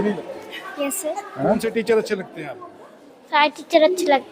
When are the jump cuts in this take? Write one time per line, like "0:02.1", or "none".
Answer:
0:01.6

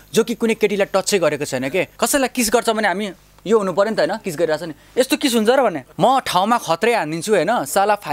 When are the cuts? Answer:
0:01.9
0:05.8

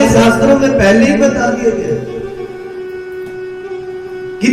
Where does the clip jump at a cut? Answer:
none

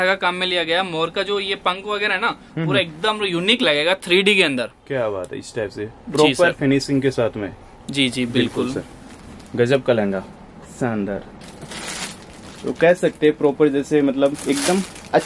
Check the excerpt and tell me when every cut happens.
none

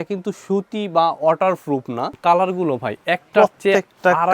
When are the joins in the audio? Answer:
0:02.1

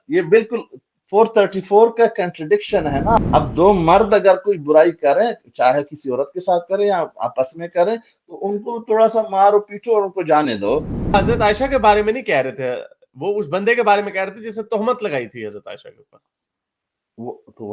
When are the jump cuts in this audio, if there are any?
0:03.2
0:11.1

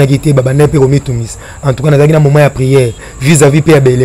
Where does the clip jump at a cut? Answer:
0:03.1

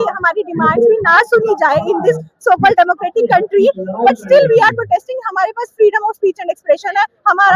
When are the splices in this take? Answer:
none

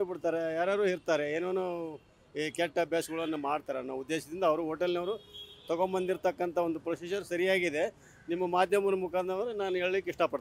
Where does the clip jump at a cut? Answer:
none

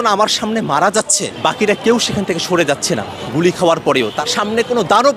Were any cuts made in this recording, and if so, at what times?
0:01.2
0:04.2

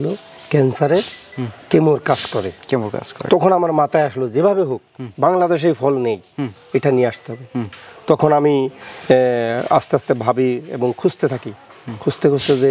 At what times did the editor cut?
none

